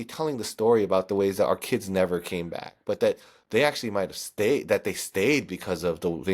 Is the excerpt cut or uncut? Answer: uncut